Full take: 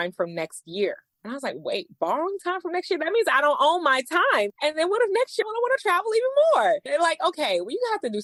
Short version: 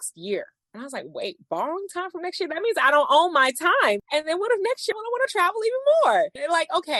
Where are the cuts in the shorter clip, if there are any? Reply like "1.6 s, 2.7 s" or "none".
none

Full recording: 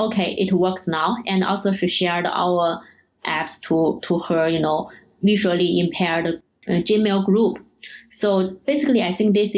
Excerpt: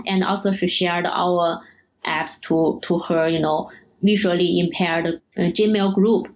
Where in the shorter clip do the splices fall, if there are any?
5.2 s

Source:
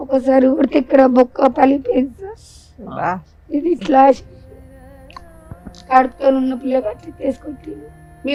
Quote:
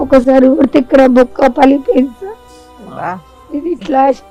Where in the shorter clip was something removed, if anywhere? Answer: none

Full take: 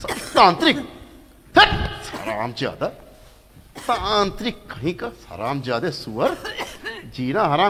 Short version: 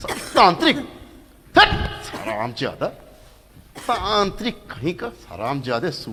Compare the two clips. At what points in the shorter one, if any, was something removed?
none

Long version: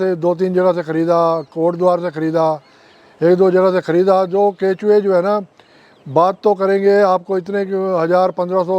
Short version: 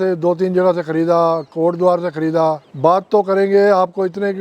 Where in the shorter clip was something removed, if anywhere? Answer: 2.7 s

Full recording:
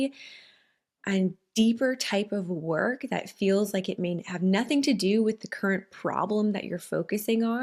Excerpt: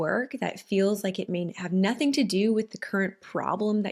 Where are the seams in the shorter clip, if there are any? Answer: none

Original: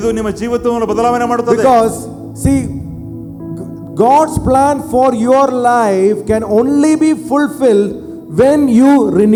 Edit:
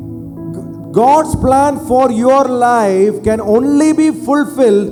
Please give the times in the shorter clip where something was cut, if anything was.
none

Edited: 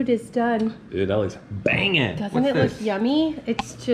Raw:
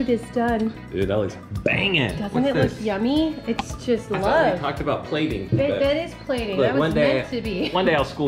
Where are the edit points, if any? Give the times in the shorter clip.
none

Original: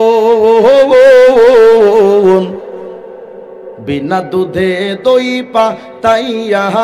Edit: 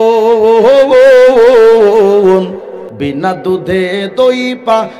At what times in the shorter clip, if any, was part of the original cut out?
2.8 s

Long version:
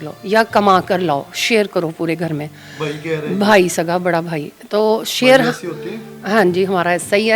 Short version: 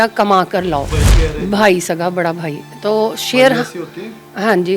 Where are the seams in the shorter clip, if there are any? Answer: 1.0 s

